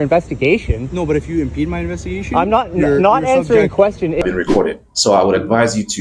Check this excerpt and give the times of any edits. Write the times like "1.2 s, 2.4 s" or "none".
4.2 s